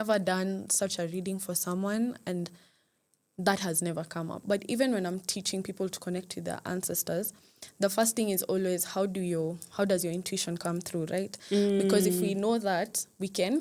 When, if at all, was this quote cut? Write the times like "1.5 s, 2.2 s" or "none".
4.4 s